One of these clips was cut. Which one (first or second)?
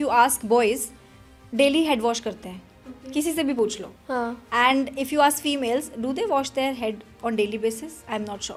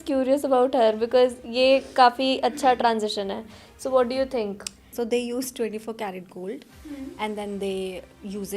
second